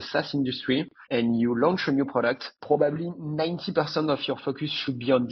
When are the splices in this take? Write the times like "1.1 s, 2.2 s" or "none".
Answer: 1.0 s, 2.5 s